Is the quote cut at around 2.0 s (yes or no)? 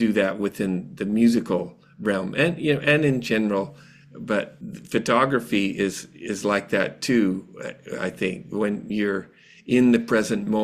no